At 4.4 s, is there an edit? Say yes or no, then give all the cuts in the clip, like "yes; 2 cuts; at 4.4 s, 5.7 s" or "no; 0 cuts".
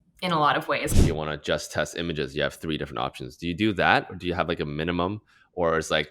no; 1 cut; at 1.0 s